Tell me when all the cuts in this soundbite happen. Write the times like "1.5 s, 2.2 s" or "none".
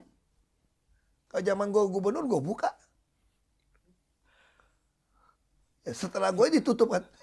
none